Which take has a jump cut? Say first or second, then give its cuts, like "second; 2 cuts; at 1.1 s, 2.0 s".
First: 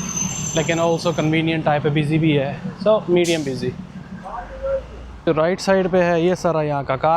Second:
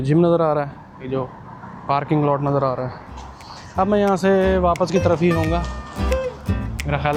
first; 1 cut; at 5.3 s